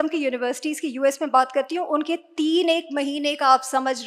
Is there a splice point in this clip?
no; 0 cuts

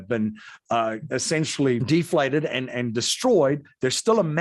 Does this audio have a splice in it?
yes; 1 cut; at 1.8 s

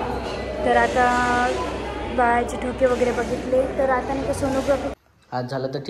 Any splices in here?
yes; 1 cut; at 4.9 s

